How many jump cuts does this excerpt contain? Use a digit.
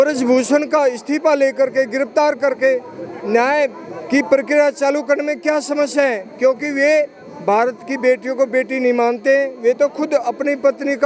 0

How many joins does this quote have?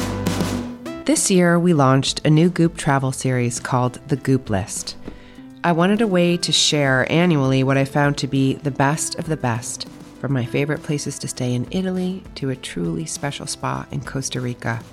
1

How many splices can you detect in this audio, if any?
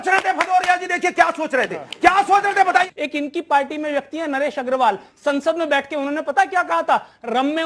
1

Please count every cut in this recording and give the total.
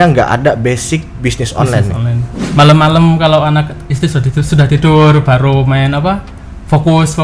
1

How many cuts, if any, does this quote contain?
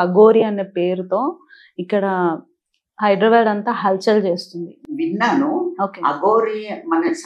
1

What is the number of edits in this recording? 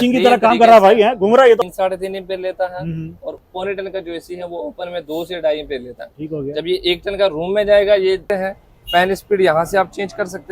2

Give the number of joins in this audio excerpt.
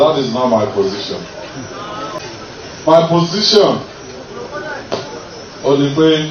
1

